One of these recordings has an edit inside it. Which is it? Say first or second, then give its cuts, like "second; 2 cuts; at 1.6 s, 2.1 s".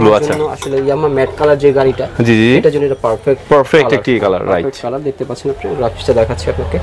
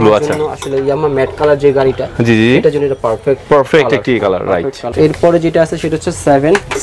second; 1 cut; at 4.9 s